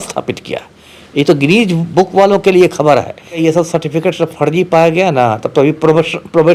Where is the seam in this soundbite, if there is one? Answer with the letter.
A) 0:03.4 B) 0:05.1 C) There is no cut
A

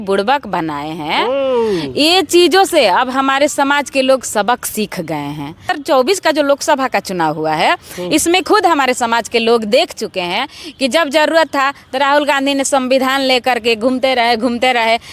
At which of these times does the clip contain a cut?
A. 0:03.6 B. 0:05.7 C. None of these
B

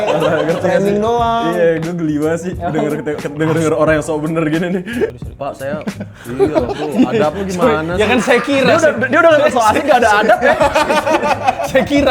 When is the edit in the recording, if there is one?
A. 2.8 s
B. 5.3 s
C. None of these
B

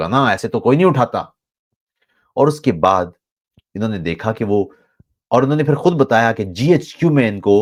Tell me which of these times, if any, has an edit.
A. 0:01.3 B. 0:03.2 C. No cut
C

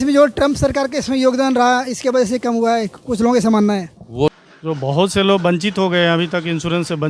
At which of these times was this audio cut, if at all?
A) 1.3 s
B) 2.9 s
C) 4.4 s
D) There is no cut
C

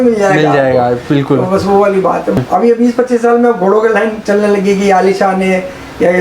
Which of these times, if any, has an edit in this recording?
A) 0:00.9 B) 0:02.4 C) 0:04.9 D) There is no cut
B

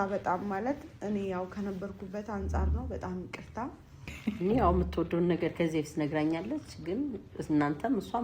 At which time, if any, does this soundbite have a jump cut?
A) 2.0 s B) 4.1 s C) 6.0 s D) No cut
B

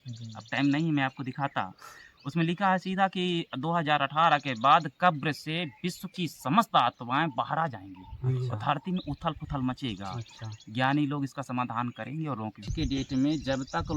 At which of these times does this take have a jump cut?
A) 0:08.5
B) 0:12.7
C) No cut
B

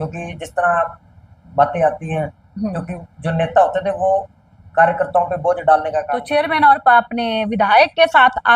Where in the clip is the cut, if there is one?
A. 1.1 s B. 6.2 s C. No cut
B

